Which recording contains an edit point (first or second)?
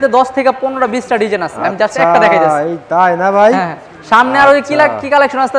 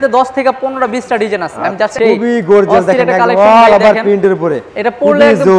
second